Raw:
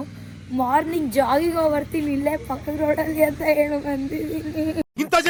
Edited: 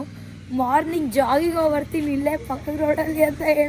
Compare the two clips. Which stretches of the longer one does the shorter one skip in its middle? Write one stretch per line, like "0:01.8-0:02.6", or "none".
none